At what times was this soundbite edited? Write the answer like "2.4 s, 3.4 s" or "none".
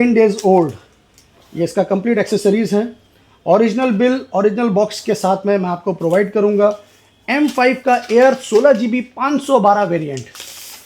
none

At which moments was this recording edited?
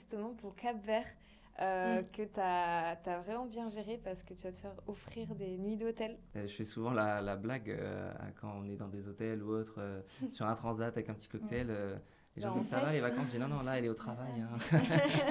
6.2 s

